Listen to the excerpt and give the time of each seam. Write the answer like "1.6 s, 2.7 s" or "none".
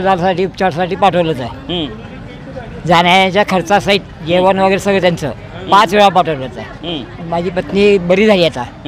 none

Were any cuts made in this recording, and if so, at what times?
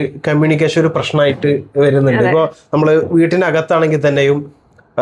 none

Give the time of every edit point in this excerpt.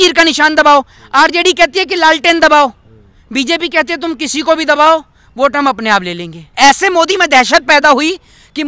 6.5 s

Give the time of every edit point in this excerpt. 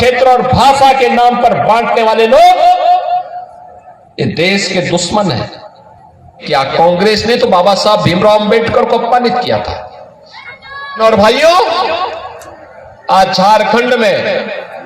6.4 s, 11.0 s

